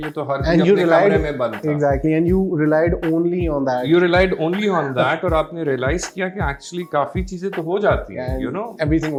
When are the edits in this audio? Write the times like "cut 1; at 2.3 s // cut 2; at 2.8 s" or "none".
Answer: none